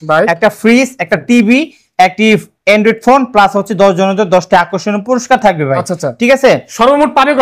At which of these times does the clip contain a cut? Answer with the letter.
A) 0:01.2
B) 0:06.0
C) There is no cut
C